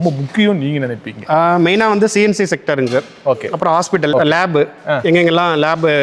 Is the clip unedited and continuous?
no; 1 cut; at 4.1 s

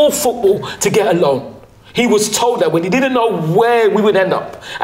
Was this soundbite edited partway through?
no; 0 cuts

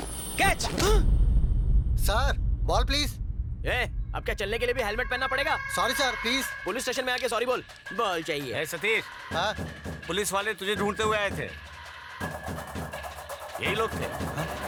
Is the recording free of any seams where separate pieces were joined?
yes; 0 cuts

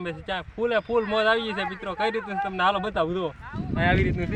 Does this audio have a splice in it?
no; 0 cuts

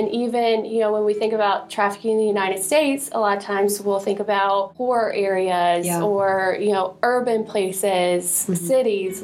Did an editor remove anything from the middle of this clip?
no; 0 cuts

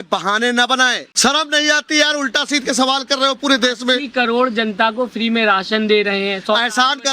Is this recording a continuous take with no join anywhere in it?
no; 1 cut; at 1.0 s

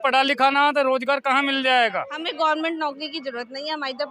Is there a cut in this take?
yes; 1 cut; at 2.2 s

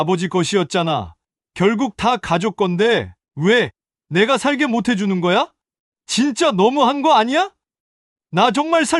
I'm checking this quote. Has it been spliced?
no; 0 cuts

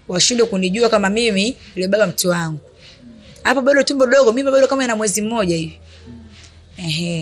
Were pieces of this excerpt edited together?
no; 0 cuts

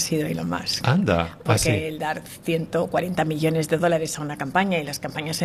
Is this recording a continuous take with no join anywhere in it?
yes; 0 cuts

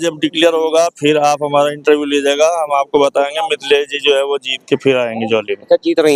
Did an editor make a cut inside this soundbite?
no; 0 cuts

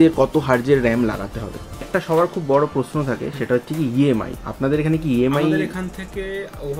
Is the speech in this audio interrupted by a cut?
yes; 1 cut; at 1.7 s

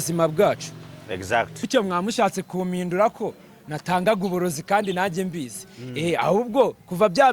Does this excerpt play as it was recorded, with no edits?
no; 1 cut; at 1.6 s

